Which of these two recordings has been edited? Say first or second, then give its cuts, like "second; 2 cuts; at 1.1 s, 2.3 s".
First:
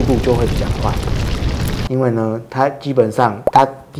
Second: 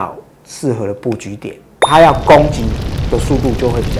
second; 1 cut; at 1.8 s